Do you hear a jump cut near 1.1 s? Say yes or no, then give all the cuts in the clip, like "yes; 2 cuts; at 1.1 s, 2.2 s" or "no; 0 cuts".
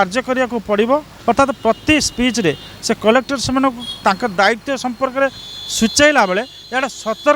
yes; 1 cut; at 1.1 s